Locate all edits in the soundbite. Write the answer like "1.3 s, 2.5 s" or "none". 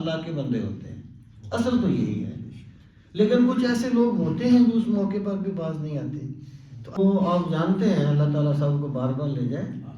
7.0 s